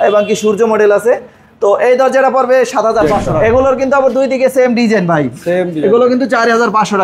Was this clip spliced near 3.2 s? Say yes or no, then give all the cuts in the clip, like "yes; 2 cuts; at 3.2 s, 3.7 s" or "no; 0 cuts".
yes; 1 cut; at 3.2 s